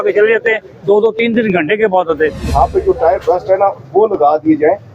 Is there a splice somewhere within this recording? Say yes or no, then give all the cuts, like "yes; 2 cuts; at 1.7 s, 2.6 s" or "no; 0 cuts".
yes; 1 cut; at 2.5 s